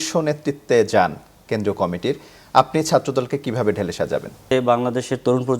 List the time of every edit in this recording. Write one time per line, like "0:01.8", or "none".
0:04.5